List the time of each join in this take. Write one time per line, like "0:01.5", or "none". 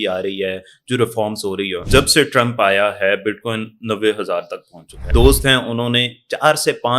0:01.8
0:05.1